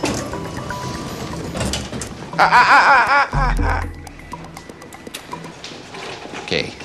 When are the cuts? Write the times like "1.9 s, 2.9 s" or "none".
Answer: 5.5 s